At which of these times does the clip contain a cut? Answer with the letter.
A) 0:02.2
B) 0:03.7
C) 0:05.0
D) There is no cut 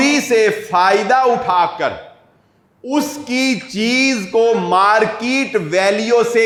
D